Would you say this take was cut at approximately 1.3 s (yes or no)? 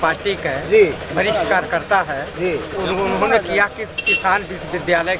no